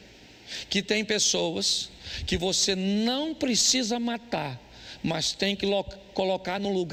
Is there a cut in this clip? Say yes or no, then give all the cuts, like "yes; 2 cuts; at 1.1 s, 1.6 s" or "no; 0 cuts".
no; 0 cuts